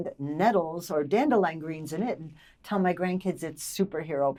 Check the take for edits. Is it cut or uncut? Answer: uncut